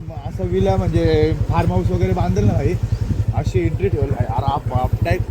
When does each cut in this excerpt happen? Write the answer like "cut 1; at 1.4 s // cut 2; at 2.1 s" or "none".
none

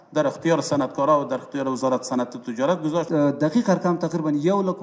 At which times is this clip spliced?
cut 1; at 3.1 s

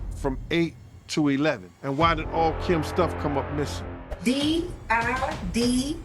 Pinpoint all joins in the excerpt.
cut 1; at 1.7 s // cut 2; at 4.1 s

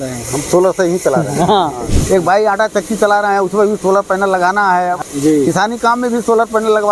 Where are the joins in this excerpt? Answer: cut 1; at 1.9 s // cut 2; at 5.0 s

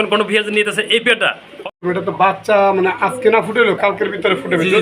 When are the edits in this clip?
cut 1; at 1.7 s

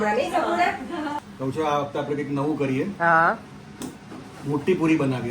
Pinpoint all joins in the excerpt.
cut 1; at 1.2 s

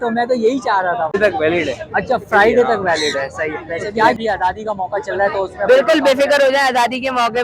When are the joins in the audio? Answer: cut 1; at 1.2 s // cut 2; at 4.2 s

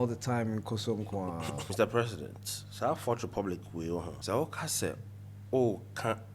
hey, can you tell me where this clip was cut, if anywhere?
cut 1; at 1.7 s // cut 2; at 4.1 s

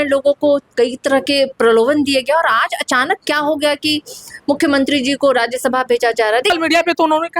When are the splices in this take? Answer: cut 1; at 6.5 s

